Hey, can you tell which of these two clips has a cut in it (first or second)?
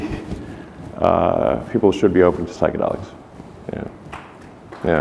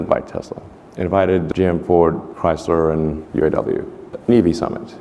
second